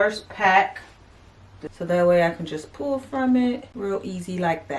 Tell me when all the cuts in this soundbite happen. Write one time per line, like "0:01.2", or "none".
0:01.6
0:03.7